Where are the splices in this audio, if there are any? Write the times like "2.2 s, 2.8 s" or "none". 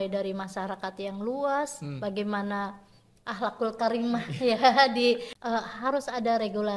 5.3 s